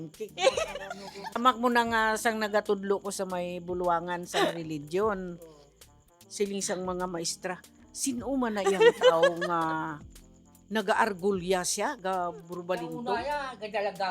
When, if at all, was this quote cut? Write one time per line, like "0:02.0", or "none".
0:01.4